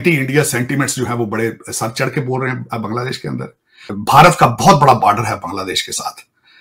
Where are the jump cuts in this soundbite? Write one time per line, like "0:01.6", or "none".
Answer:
0:03.8